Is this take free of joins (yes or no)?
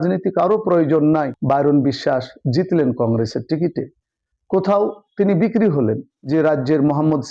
no